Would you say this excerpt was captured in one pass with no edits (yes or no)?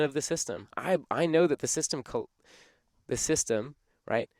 yes